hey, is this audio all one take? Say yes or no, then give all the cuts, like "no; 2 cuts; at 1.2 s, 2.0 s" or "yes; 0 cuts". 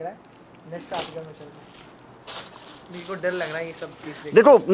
yes; 0 cuts